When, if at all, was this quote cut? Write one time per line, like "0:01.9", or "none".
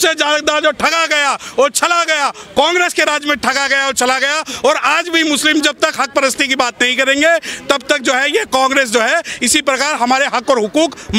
none